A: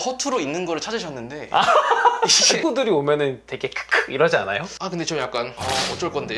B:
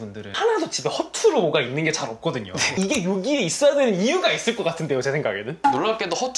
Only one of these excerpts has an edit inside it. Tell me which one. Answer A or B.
A